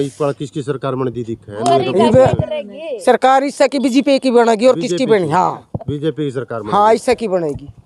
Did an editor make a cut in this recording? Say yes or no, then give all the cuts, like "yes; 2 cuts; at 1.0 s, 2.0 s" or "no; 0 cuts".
no; 0 cuts